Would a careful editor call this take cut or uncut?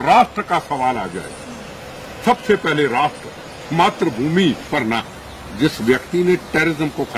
cut